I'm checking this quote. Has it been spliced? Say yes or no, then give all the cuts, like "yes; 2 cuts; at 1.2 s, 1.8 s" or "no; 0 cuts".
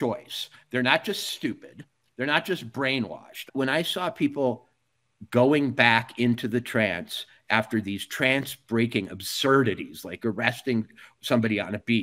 yes; 1 cut; at 3.4 s